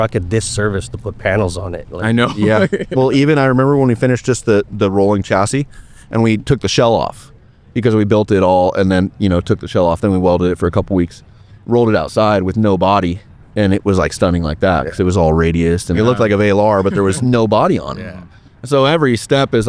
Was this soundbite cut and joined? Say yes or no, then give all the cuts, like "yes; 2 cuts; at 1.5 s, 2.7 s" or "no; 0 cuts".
yes; 2 cuts; at 16.0 s, 17.2 s